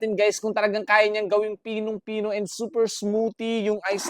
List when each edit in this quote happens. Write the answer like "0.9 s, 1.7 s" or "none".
none

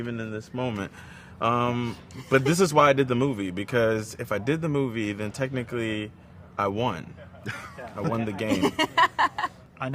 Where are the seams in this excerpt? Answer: none

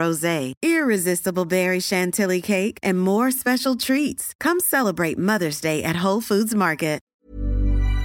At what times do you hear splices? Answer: 7.1 s

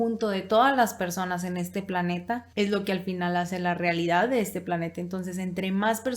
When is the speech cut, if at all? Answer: 2.5 s

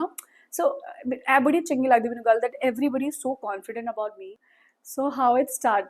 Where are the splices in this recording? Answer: 4.3 s

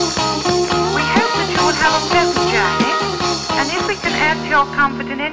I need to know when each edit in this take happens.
4.1 s

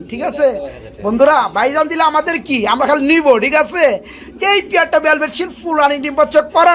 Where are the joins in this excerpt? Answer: none

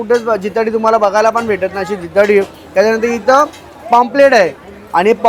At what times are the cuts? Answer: none

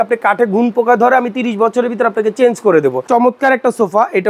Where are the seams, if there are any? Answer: 3.0 s

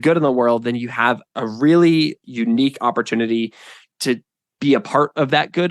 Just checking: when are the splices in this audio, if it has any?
1.2 s, 2.2 s

